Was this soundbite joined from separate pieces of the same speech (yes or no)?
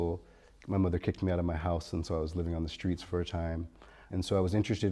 yes